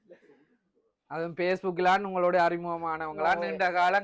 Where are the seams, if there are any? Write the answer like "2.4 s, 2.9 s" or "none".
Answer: none